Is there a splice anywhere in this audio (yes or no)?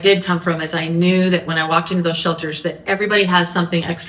no